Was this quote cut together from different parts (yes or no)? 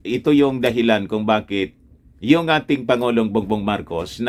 no